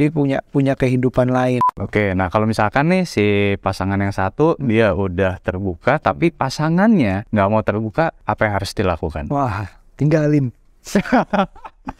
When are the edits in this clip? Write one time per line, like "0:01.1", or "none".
0:01.7
0:07.2
0:08.2